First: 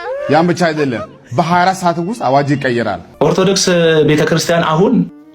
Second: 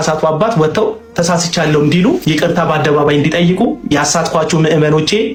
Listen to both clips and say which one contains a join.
first; 1 cut; at 3.0 s

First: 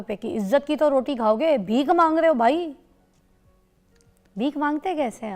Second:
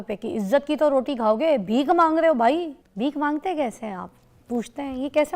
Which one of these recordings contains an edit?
second; 1 cut; at 2.8 s

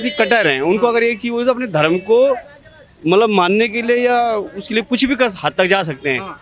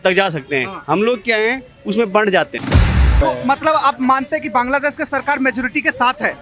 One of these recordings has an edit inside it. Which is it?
second; 1 cut; at 3.1 s

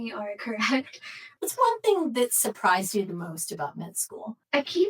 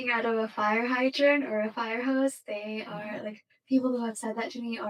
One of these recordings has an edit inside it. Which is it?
first; 1 cut; at 1.3 s

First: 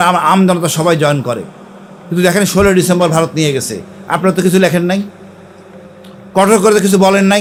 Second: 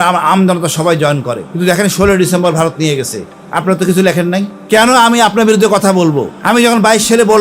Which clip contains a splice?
second; 3 cuts; at 1.4 s, 4.5 s, 6.3 s

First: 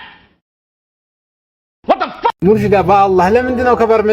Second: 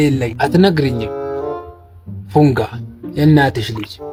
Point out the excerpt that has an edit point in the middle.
first; 1 cut; at 2.4 s

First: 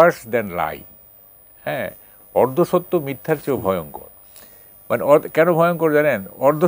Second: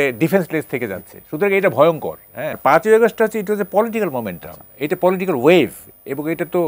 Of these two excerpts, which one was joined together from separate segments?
second; 1 cut; at 2.6 s

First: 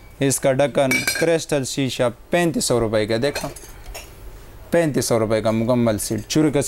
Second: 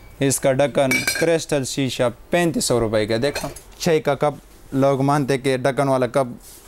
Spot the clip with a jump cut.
second; 1 cut; at 3.7 s

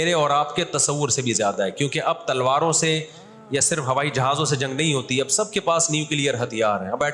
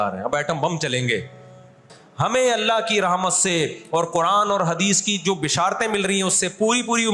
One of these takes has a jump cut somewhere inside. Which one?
second; 1 cut; at 2.0 s

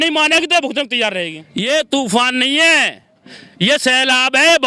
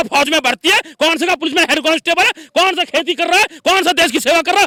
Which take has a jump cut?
first; 1 cut; at 1.4 s

